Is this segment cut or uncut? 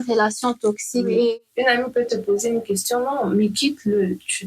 cut